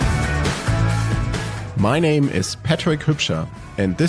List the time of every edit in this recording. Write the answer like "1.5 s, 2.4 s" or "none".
1.0 s

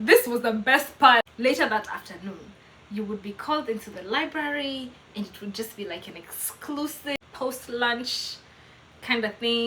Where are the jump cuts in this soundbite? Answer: 1.3 s, 7.2 s

